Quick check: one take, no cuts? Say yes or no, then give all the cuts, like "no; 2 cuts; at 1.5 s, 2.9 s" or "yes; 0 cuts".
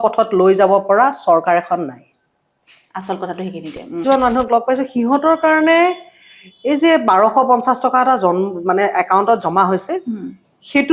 no; 1 cut; at 3.8 s